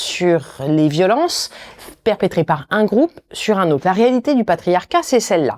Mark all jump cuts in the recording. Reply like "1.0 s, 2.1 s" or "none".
none